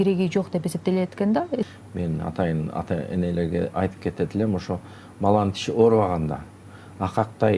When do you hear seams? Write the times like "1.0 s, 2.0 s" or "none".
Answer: 1.7 s